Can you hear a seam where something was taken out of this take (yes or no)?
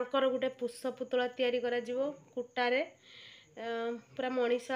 no